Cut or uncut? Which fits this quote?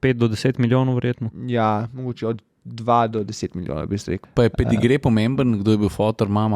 cut